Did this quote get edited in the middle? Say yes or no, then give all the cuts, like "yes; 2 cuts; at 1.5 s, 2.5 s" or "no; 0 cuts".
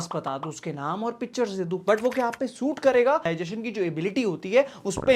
yes; 1 cut; at 3.2 s